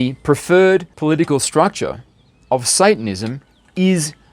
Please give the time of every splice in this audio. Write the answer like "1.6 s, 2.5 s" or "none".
0.9 s